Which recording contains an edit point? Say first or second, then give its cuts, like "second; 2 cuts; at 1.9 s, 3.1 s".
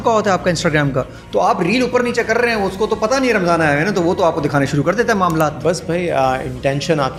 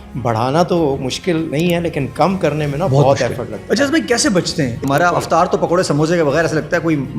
second; 3 cuts; at 1.5 s, 3.6 s, 4.8 s